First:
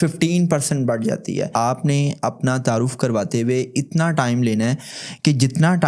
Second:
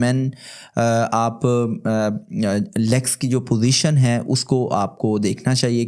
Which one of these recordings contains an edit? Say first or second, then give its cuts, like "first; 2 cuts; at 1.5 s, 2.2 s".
first; 1 cut; at 1.5 s